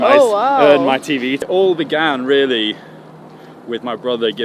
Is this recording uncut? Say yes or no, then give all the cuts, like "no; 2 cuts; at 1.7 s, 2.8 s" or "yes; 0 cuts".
no; 1 cut; at 1.5 s